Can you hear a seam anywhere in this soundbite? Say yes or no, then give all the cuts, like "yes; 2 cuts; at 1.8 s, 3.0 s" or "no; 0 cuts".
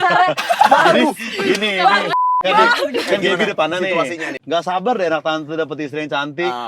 yes; 1 cut; at 4.3 s